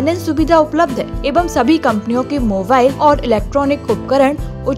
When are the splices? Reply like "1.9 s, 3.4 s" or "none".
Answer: 1.2 s, 3.0 s